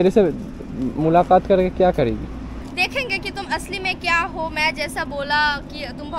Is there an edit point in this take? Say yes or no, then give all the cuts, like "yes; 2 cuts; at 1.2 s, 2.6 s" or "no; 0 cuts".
no; 0 cuts